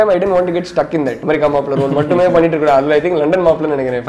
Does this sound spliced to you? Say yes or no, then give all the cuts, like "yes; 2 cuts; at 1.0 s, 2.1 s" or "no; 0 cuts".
yes; 1 cut; at 1.2 s